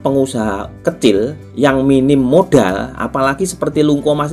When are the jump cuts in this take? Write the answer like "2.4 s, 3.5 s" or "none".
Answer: 1.4 s